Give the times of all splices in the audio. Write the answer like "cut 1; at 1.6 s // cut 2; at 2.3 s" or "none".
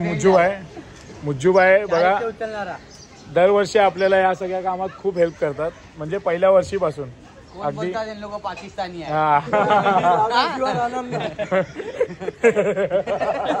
none